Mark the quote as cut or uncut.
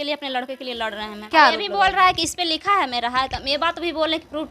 cut